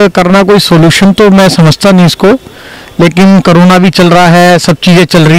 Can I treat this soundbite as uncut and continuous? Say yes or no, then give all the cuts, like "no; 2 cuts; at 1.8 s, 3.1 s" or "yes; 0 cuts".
yes; 0 cuts